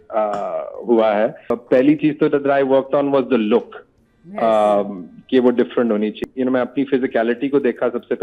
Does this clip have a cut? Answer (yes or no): yes